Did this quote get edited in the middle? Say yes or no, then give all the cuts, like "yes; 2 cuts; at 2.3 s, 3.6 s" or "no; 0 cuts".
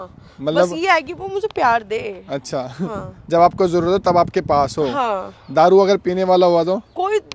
no; 0 cuts